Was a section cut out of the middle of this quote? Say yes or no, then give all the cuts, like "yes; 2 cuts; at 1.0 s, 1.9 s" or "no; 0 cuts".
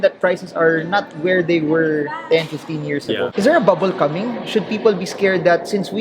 yes; 1 cut; at 3.3 s